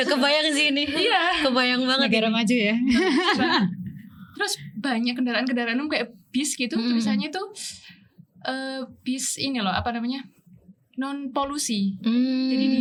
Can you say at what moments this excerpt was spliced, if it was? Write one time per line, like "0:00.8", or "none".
none